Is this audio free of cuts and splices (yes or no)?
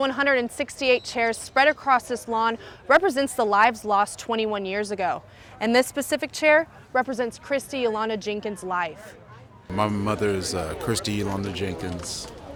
yes